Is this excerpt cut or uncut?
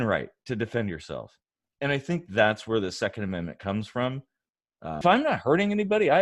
cut